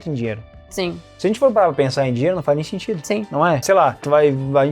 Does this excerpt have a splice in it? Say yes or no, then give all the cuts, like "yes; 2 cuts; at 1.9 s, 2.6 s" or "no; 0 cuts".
no; 0 cuts